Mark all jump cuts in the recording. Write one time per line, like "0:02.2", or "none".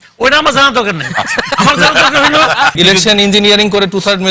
0:02.7